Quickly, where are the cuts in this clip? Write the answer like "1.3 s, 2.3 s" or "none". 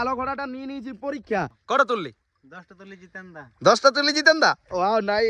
1.6 s